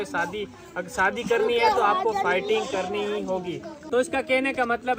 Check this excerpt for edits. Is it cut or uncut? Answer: cut